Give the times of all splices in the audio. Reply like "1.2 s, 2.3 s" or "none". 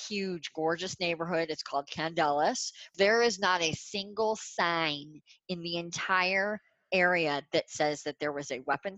2.9 s

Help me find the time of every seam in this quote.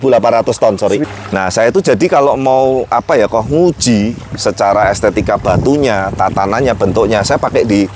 1.0 s

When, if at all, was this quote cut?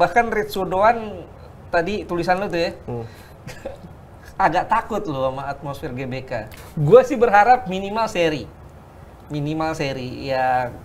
6.4 s

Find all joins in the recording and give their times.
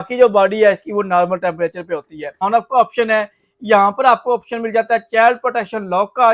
2.4 s

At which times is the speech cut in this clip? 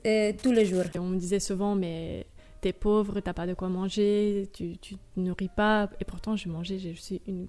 1.0 s

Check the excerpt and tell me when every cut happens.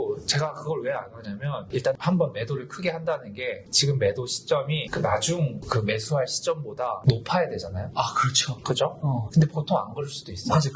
7.8 s, 9.3 s

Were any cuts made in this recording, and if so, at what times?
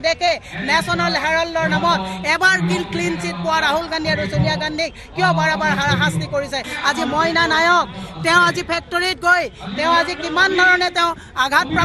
6.7 s

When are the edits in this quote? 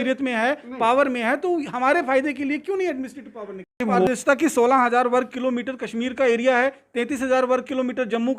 3.8 s

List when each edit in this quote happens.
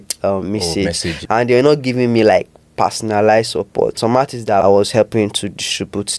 1.2 s, 4.1 s

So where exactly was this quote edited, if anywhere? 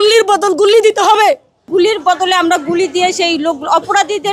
1.6 s

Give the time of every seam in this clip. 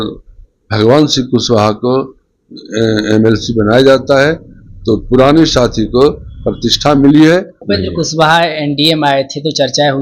7.6 s

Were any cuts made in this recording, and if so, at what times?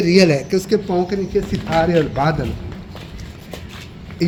none

